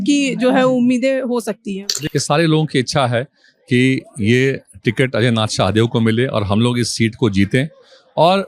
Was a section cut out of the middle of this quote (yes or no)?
yes